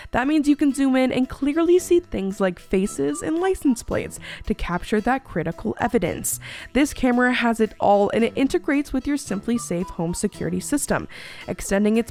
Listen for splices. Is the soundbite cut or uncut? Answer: uncut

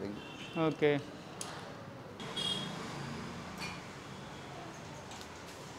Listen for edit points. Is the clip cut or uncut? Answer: cut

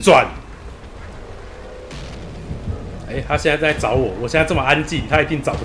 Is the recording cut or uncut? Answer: cut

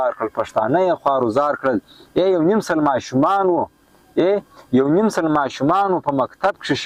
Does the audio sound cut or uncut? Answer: uncut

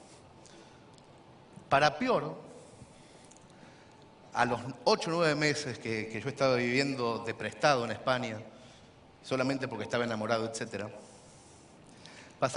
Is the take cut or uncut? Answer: cut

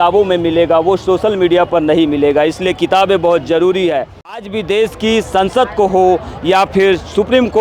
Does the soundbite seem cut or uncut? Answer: cut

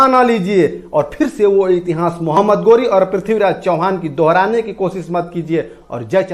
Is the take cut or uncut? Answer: uncut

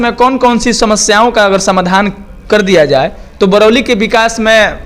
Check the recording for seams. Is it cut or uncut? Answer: uncut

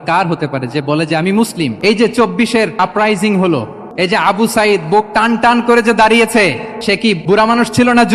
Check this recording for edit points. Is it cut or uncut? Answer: cut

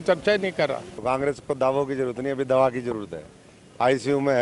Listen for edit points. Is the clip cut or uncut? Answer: cut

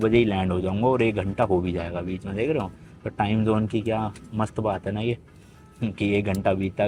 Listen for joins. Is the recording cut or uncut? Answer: uncut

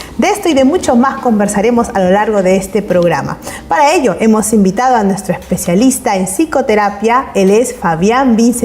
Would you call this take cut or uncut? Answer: cut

